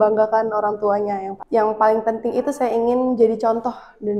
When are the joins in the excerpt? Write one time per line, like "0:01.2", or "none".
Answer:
0:01.3